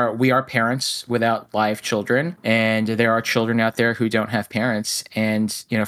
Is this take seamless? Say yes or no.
no